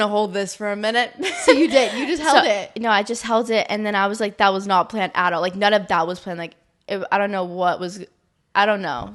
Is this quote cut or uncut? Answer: uncut